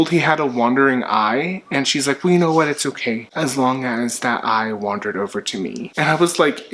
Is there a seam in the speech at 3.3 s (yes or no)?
yes